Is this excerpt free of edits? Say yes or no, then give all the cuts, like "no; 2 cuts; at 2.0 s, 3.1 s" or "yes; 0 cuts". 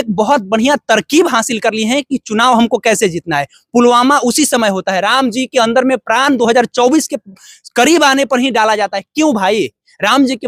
yes; 0 cuts